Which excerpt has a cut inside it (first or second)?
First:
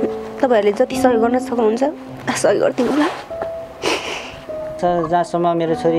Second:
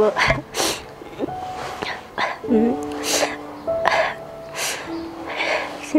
first